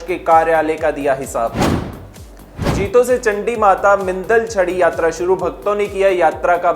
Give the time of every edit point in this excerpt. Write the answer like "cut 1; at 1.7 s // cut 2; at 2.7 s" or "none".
cut 1; at 2.6 s